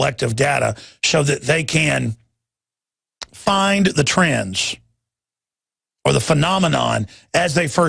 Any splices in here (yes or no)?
yes